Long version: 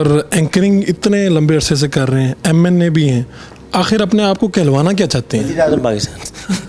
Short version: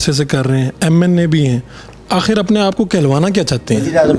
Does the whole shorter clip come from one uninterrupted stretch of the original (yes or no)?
yes